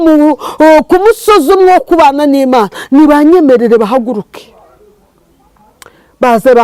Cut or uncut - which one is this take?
uncut